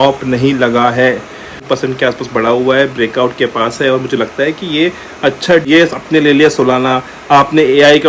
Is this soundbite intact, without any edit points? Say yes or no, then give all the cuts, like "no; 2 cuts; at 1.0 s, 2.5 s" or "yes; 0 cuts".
no; 2 cuts; at 1.6 s, 5.6 s